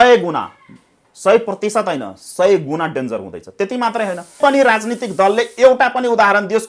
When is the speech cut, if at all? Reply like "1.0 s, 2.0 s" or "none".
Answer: 4.4 s

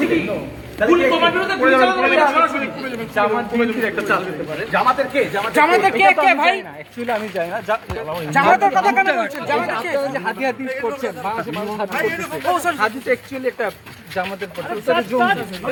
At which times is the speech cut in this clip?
none

